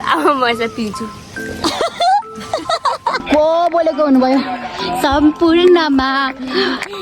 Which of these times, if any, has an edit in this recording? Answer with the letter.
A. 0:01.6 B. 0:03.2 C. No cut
B